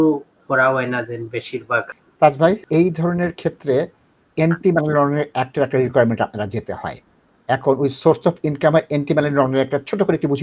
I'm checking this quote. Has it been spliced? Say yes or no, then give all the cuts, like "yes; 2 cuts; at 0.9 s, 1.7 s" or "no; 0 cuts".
yes; 2 cuts; at 1.9 s, 2.6 s